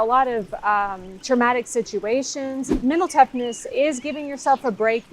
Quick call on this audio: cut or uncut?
cut